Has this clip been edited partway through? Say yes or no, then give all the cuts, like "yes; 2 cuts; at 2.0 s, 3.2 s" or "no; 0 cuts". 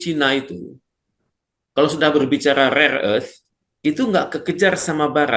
no; 0 cuts